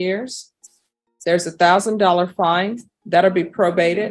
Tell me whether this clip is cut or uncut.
uncut